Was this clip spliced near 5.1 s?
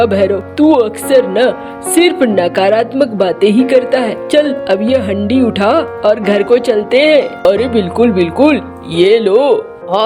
no; 1 cut; at 7.4 s

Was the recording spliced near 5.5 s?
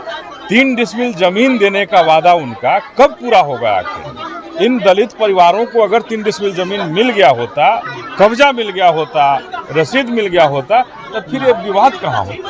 no; 0 cuts

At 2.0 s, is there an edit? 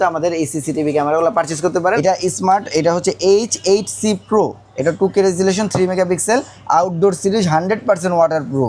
yes; 1 cut; at 2.0 s

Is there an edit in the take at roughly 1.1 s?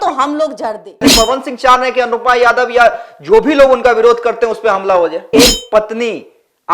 yes; 2 cuts; at 1.1 s, 5.2 s

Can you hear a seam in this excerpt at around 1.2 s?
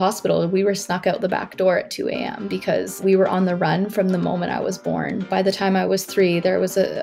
no; 2 cuts; at 3.0 s, 5.3 s

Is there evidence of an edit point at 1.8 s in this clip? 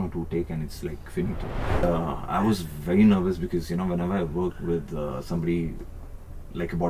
yes; 1 cut; at 1.8 s

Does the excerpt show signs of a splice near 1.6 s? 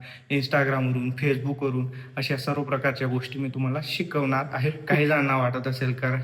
no; 1 cut; at 4.9 s

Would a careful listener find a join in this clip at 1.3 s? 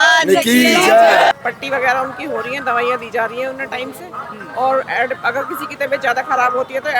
yes; 1 cut; at 1.3 s

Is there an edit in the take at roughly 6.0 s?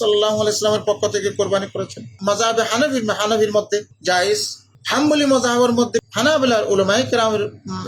yes; 2 cuts; at 2.1 s, 6.0 s

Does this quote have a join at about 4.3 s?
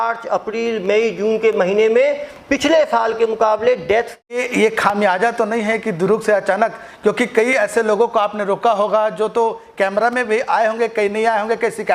yes; 1 cut; at 4.3 s

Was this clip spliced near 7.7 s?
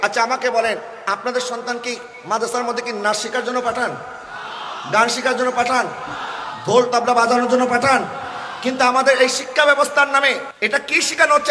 no; 1 cut; at 10.5 s

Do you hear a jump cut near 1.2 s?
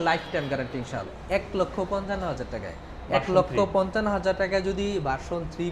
yes; 1 cut; at 1.2 s

